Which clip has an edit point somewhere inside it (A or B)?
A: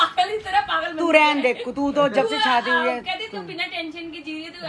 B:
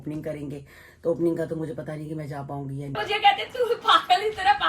B